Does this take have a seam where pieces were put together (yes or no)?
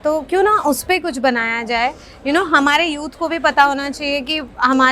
no